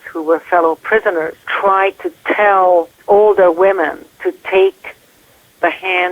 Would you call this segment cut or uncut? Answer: cut